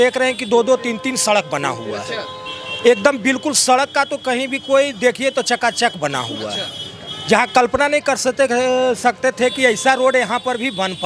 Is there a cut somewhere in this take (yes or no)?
no